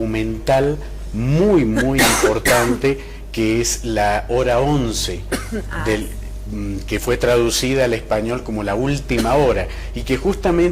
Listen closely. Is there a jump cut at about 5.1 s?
yes; 1 cut; at 5.1 s

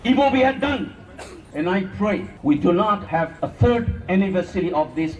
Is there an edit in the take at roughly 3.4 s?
yes; 2 cuts; at 1.5 s, 3.4 s

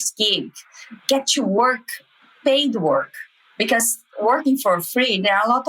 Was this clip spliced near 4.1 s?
no; 1 cut; at 1.0 s

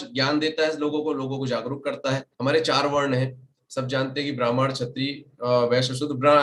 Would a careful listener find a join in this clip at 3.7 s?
no; 1 cut; at 2.3 s

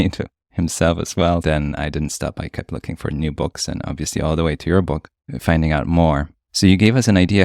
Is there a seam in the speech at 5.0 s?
no; 1 cut; at 1.4 s

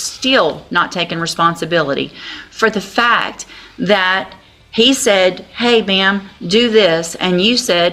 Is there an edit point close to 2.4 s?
no; 0 cuts

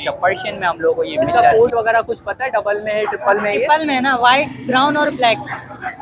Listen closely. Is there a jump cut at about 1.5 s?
yes; 1 cut; at 1.5 s

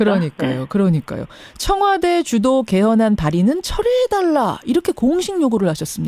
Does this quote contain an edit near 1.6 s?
no; 1 cut; at 3.6 s

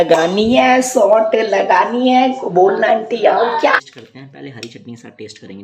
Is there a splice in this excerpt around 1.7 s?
no; 1 cut; at 3.8 s

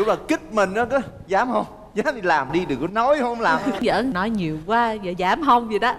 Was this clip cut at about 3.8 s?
yes; 1 cut; at 3.8 s

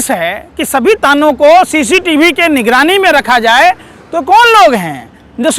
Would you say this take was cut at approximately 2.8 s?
no; 0 cuts

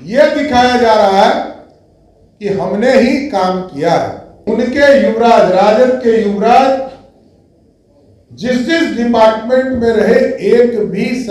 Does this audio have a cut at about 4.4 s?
yes; 1 cut; at 4.4 s

